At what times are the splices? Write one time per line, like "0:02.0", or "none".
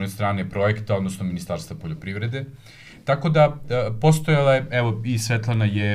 none